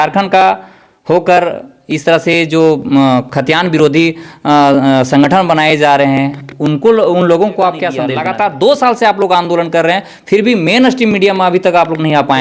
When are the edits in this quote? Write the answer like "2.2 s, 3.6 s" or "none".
8.1 s